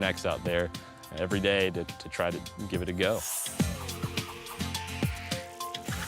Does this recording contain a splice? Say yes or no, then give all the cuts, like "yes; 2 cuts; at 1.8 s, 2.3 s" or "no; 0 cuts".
yes; 1 cut; at 3.4 s